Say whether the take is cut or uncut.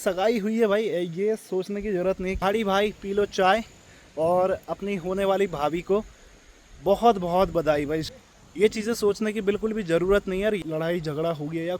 cut